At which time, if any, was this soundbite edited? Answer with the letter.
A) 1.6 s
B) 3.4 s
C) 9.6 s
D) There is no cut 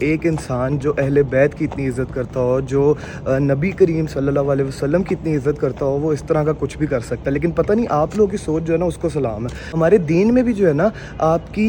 C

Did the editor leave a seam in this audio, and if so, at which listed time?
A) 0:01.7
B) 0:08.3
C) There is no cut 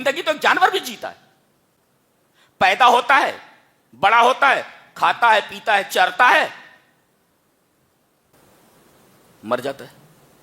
B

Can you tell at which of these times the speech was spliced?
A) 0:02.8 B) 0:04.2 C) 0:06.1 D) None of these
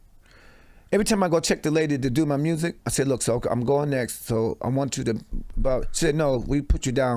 A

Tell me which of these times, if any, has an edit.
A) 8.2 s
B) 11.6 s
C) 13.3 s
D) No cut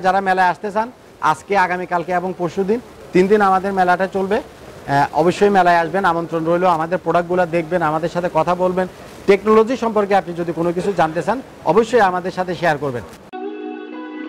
C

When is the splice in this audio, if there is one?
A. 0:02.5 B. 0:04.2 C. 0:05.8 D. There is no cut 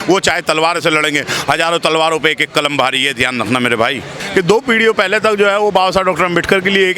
B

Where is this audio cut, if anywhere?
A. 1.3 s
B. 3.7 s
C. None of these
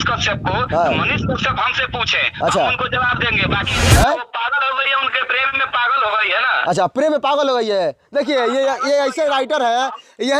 B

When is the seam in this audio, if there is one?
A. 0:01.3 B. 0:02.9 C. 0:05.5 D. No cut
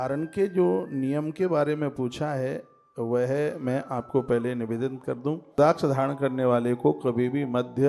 C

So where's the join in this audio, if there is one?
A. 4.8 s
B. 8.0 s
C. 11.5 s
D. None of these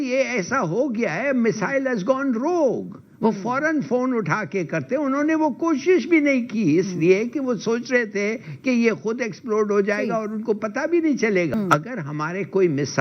C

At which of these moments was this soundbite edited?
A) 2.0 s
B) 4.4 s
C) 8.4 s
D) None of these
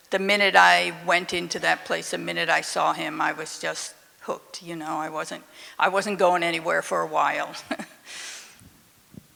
D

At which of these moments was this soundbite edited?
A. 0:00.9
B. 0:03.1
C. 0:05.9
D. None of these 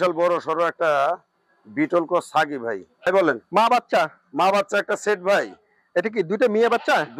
B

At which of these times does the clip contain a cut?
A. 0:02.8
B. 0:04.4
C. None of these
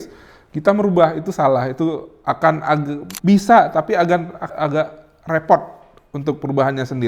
B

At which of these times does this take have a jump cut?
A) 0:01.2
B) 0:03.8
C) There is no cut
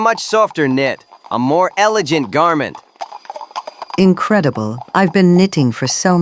B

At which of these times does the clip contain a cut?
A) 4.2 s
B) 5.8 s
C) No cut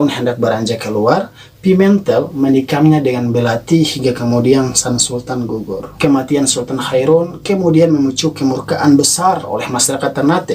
B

